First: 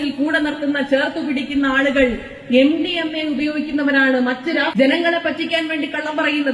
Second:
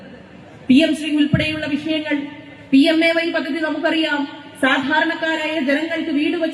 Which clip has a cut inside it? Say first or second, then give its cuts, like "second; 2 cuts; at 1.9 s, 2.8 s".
first; 1 cut; at 4.7 s